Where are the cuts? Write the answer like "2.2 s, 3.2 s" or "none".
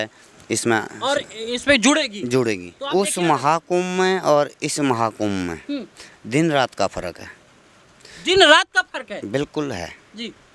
2.7 s